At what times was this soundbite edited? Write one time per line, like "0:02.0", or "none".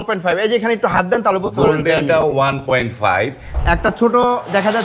0:03.6